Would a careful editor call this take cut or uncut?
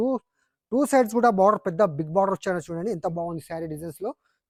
uncut